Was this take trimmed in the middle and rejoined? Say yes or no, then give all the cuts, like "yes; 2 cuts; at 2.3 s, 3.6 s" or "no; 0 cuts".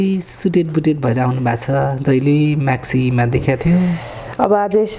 no; 0 cuts